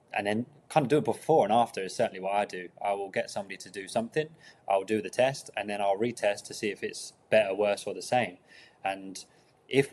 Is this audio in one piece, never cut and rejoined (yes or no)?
yes